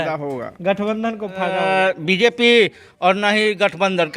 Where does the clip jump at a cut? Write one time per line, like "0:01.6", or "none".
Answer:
0:01.5